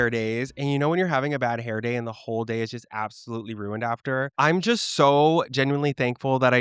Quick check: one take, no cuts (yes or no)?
yes